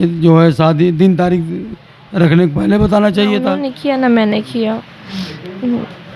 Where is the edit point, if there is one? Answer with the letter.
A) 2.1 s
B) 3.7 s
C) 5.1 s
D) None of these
B